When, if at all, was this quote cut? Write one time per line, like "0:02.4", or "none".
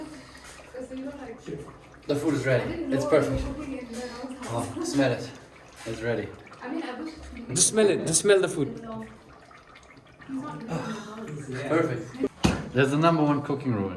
0:12.3